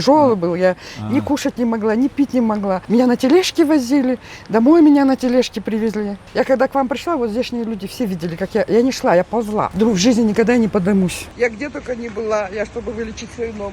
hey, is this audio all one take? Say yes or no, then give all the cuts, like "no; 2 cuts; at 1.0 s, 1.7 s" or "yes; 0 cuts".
no; 4 cuts; at 2.8 s, 6.2 s, 9.7 s, 11.2 s